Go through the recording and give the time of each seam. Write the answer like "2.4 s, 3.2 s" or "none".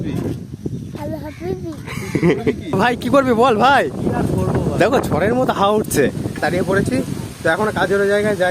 2.8 s, 6.4 s